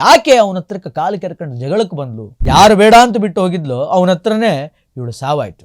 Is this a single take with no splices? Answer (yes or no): no